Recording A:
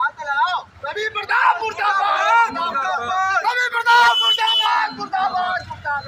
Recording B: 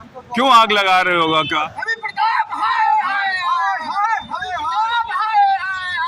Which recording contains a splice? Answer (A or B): B